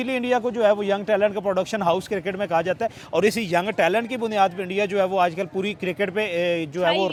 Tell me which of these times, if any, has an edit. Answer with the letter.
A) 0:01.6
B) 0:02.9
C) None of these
C